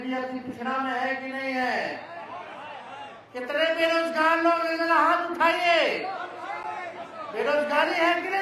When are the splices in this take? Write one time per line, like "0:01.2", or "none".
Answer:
none

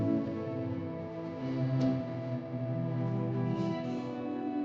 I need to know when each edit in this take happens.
none

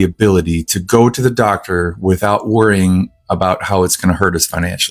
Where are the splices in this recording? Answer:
none

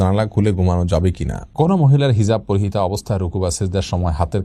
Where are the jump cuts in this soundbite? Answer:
0:01.4

